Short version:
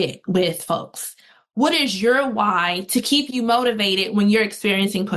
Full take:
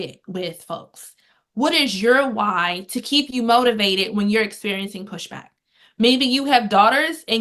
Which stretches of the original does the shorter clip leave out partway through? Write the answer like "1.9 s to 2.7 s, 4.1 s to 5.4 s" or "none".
none